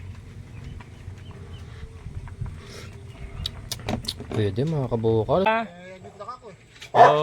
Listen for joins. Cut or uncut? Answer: cut